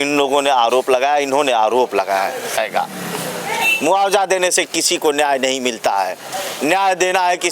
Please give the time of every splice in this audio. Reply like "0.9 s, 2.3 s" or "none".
2.6 s